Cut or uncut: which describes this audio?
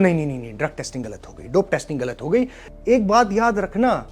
cut